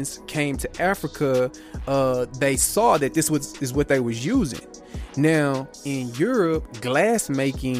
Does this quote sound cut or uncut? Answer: uncut